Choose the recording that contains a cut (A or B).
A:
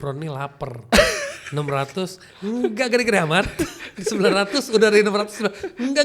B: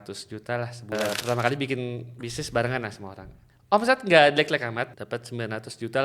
B